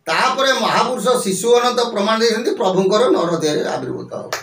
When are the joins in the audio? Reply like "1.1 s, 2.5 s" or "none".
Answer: none